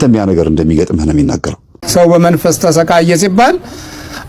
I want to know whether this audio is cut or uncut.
cut